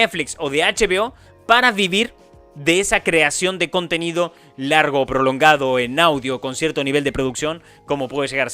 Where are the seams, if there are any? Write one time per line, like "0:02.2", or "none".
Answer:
none